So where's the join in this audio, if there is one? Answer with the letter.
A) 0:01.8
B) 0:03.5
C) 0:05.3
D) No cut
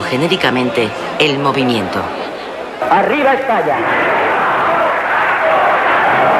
D